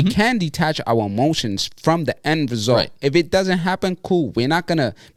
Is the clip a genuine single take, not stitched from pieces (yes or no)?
yes